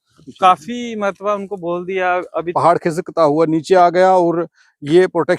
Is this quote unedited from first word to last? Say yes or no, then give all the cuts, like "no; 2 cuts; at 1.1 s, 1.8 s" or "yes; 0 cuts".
no; 1 cut; at 2.5 s